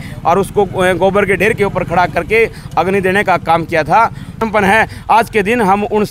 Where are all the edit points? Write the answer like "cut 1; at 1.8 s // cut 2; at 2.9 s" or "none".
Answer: cut 1; at 4.4 s